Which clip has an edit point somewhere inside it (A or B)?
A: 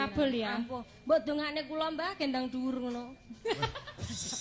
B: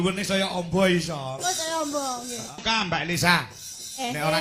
B